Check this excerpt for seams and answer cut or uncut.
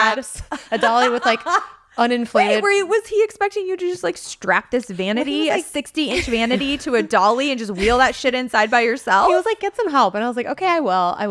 uncut